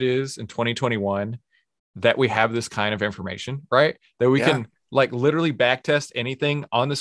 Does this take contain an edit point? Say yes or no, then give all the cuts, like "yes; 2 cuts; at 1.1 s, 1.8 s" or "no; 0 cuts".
no; 0 cuts